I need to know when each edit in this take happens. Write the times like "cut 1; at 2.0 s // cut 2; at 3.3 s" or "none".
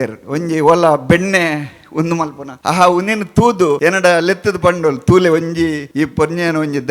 cut 1; at 2.5 s // cut 2; at 3.8 s // cut 3; at 5.8 s